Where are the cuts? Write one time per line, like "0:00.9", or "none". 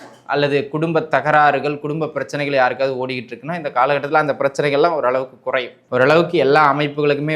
0:05.8